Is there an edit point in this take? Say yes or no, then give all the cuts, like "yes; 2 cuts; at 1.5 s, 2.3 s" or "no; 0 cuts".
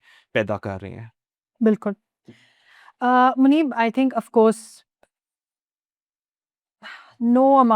no; 0 cuts